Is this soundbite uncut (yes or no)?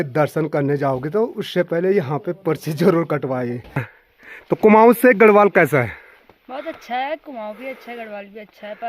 no